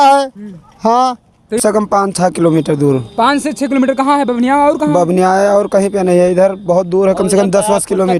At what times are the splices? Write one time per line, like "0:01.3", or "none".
0:01.6